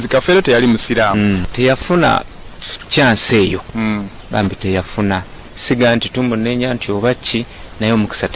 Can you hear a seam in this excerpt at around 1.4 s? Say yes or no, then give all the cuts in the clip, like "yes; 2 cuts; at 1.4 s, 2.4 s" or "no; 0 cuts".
yes; 1 cut; at 1.4 s